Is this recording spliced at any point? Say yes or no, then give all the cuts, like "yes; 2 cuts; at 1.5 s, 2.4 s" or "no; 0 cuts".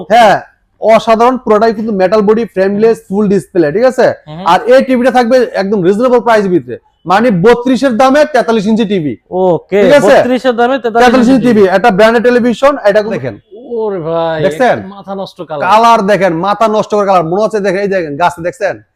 yes; 1 cut; at 13.2 s